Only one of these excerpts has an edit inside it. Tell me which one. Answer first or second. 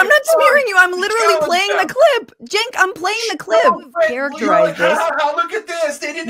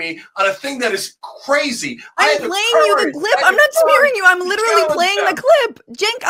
first